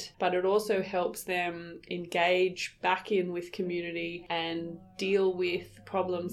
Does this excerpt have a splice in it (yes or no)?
no